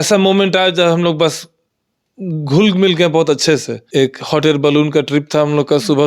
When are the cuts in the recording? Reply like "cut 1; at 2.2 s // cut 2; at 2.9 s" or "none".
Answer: cut 1; at 3.8 s